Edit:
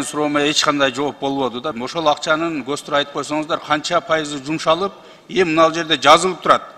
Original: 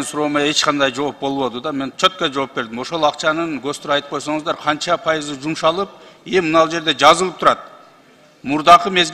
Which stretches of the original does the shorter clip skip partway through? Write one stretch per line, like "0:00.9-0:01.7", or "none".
0:01.7-0:02.7